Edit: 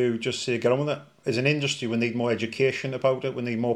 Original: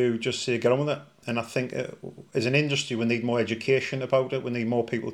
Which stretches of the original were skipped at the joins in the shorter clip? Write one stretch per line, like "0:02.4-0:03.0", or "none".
0:01.1-0:02.2